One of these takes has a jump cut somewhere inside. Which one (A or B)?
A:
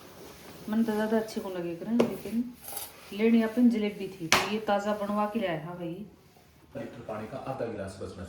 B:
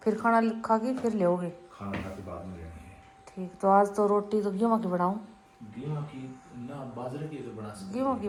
A